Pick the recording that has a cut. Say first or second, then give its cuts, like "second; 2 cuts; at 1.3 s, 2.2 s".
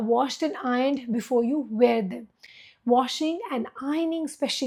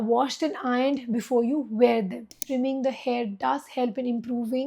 second; 1 cut; at 2.3 s